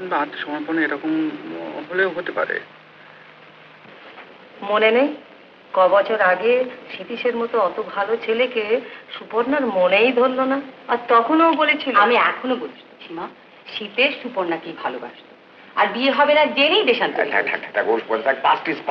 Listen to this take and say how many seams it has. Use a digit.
0